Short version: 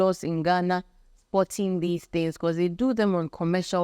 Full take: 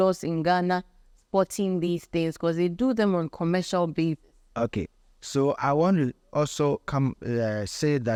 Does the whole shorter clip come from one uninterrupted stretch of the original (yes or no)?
yes